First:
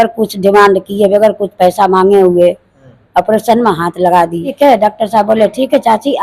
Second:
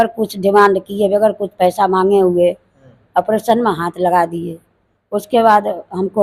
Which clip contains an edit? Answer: first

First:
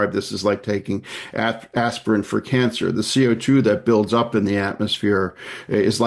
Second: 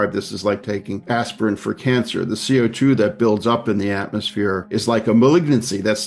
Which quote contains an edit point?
second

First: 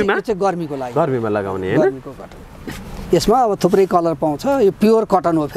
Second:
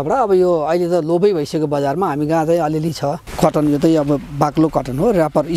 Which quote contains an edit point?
second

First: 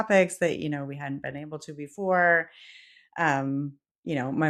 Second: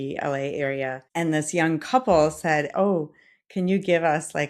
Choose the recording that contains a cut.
second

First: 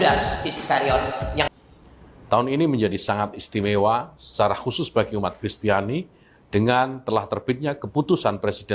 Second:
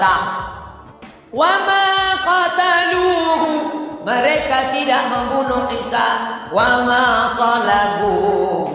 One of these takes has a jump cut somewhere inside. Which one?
first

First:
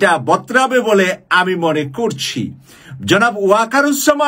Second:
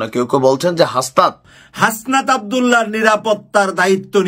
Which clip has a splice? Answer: second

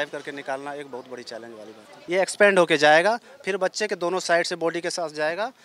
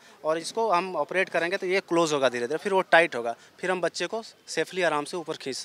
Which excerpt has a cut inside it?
first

